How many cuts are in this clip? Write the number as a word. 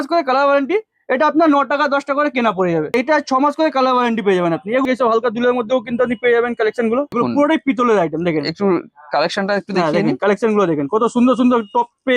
three